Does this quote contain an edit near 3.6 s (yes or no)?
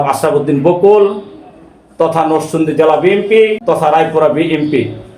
yes